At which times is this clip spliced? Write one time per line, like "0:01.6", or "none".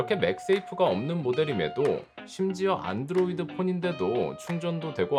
none

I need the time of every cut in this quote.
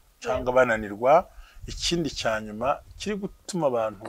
none

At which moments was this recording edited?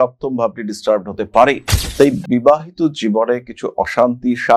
none

